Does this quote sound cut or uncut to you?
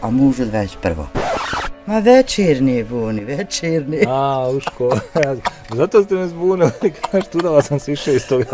cut